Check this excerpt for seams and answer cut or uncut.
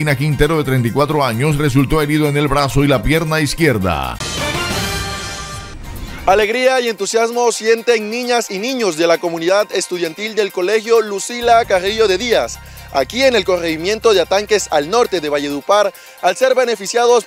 cut